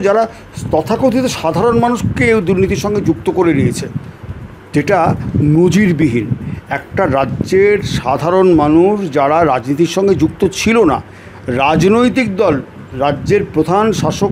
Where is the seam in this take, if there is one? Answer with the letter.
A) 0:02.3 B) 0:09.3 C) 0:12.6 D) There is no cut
D